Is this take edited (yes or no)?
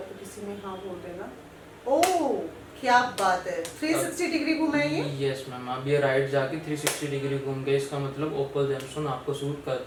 no